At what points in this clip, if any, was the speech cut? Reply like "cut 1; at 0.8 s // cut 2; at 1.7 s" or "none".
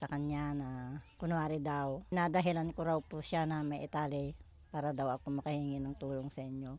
cut 1; at 1.0 s // cut 2; at 2.1 s